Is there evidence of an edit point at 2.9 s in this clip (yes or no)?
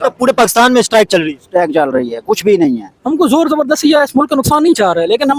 yes